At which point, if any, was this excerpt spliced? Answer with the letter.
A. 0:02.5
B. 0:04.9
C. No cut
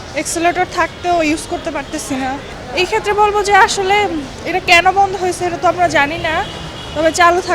A